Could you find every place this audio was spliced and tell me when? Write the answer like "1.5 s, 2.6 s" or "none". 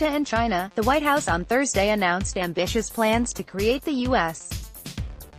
4.4 s